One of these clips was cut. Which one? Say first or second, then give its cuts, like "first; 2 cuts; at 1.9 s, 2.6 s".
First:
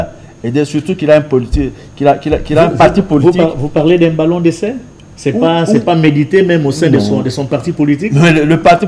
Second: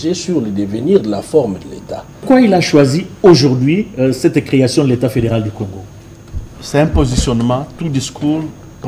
second; 1 cut; at 2.2 s